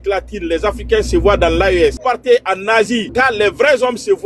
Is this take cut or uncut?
cut